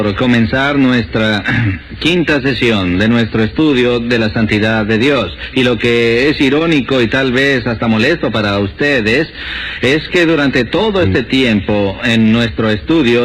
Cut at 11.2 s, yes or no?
no